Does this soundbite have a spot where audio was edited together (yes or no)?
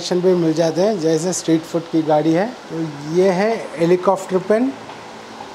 yes